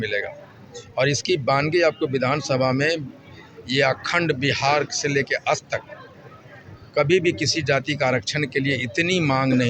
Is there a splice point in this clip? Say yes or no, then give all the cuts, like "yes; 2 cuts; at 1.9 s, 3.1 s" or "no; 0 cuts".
no; 0 cuts